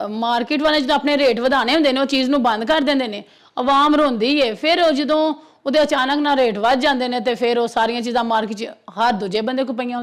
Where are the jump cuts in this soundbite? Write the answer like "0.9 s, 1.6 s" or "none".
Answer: none